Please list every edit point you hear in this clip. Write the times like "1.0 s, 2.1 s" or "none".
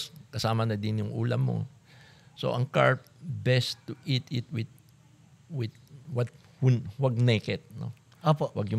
none